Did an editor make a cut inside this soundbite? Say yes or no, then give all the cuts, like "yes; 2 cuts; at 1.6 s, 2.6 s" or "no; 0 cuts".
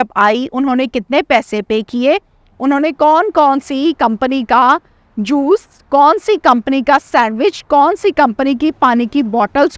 no; 0 cuts